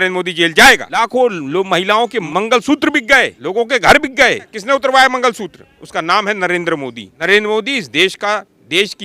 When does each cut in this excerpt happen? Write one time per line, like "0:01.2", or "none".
0:00.9
0:02.2
0:03.4
0:04.6
0:07.1